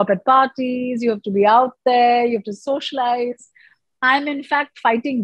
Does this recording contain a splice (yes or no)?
no